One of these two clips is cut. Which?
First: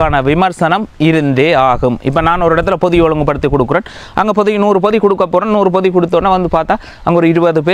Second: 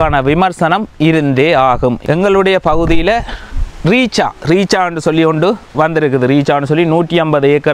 second; 1 cut; at 2.0 s

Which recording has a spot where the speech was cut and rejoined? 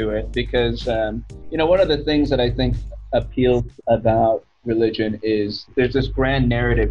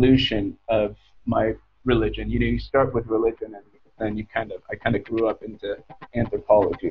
first; 2 cuts; at 3.7 s, 5.7 s

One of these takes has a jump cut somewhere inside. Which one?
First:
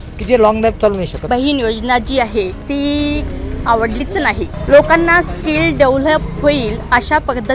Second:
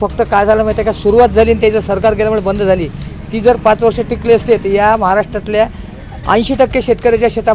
first; 3 cuts; at 1.1 s, 2.6 s, 4.6 s

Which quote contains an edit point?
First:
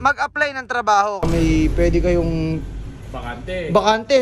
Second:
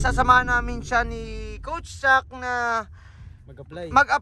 first; 1 cut; at 1.3 s

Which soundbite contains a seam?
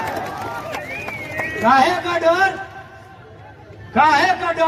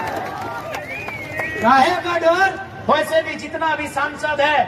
second; 1 cut; at 2.7 s

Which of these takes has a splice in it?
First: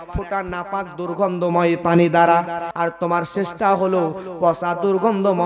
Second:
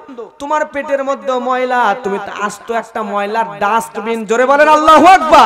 first; 1 cut; at 2.7 s

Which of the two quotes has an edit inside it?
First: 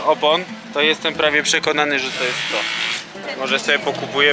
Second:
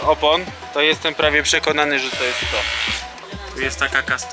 first; 1 cut; at 3.2 s

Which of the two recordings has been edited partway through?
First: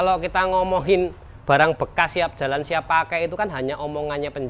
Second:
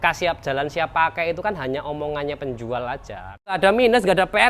second; 1 cut; at 3.6 s

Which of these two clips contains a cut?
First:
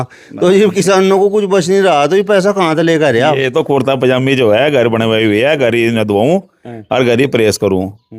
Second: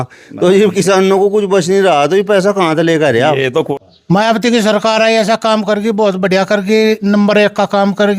second; 1 cut; at 3.7 s

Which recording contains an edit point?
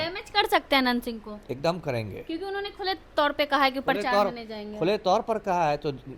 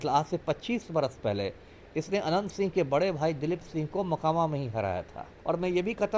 second; 1 cut; at 5.3 s

